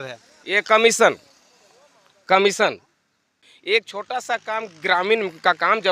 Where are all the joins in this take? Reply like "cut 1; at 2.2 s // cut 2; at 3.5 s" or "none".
cut 1; at 3.3 s